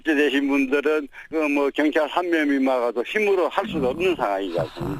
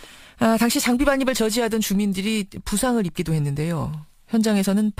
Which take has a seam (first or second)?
first